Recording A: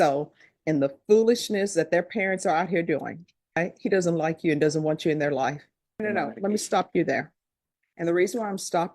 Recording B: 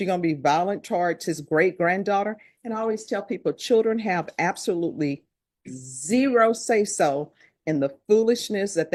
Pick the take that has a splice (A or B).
A